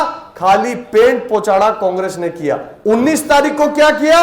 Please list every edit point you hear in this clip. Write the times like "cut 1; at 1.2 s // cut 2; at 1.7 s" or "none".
cut 1; at 2.7 s